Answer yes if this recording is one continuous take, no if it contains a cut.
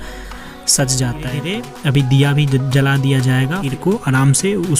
no